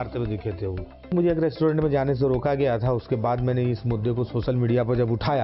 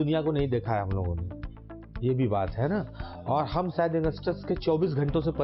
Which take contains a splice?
first; 1 cut; at 1.1 s

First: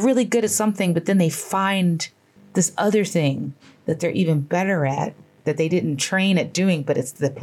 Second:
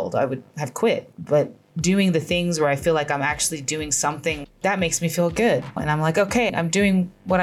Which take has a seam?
second; 3 cuts; at 1.1 s, 4.4 s, 5.8 s

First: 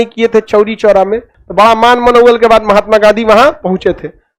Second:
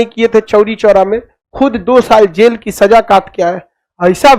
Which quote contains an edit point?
first; 1 cut; at 1.4 s

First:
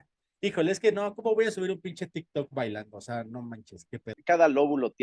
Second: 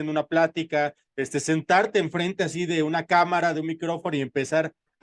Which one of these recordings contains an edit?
first; 1 cut; at 4.1 s

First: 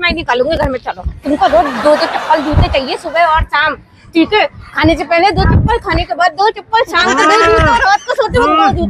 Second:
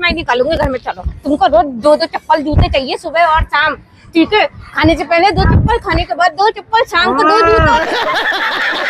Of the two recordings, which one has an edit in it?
first; 1 cut; at 7.7 s

